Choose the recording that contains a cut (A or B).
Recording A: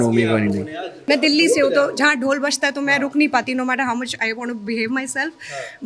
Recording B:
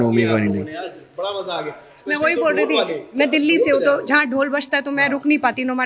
A